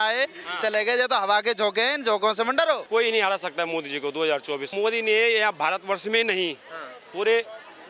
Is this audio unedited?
no; 2 cuts; at 2.9 s, 4.7 s

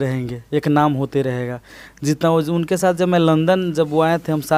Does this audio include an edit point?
no; 0 cuts

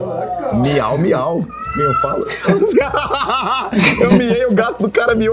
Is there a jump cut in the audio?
no; 0 cuts

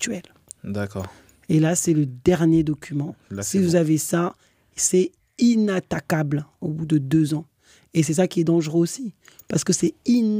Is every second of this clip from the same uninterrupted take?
yes; 0 cuts

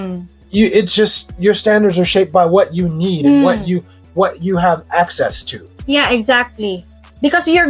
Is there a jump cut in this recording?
no; 0 cuts

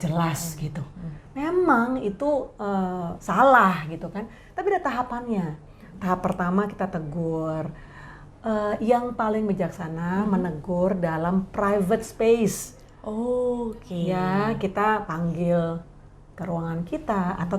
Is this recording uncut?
yes; 0 cuts

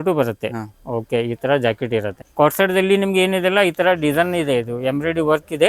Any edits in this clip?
yes; 1 cut; at 2.2 s

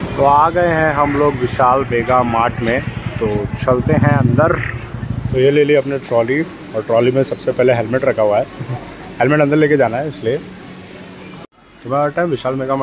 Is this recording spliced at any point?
no; 0 cuts

